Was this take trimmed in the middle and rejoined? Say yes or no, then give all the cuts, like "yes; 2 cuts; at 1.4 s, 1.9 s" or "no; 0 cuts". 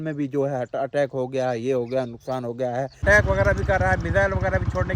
yes; 1 cut; at 3.0 s